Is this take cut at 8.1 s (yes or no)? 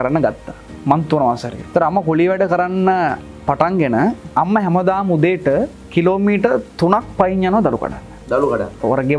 no